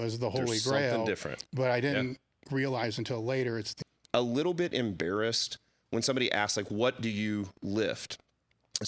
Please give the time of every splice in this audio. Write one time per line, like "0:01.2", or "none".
0:03.7